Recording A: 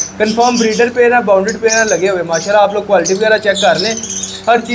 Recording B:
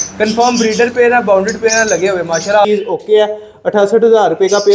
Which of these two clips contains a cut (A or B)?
B